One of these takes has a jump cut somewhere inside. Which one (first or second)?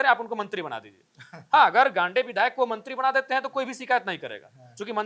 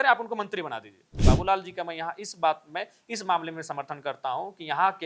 second